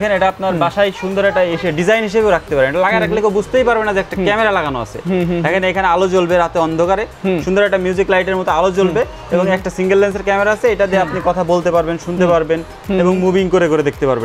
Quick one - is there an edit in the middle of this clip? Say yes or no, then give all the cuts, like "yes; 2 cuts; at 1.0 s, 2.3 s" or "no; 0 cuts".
no; 0 cuts